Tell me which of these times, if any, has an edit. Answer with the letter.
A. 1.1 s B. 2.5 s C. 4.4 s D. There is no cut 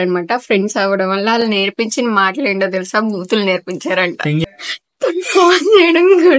C